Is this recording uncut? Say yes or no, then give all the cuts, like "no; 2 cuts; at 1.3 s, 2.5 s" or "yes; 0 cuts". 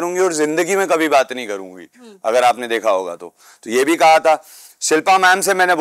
yes; 0 cuts